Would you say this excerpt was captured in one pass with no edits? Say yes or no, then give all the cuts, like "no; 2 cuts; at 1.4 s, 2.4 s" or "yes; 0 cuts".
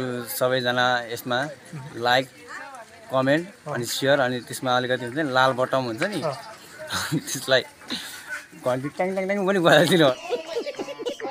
yes; 0 cuts